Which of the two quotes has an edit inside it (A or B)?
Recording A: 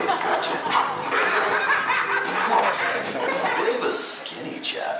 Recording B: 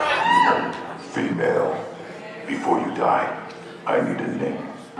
A